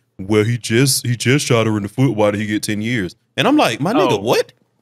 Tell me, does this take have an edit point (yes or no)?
no